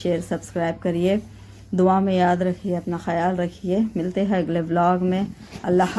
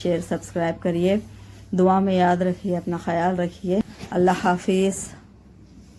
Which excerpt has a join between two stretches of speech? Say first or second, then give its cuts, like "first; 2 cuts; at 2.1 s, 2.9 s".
second; 1 cut; at 3.8 s